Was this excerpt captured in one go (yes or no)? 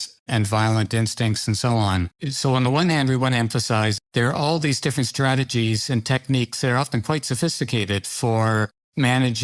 no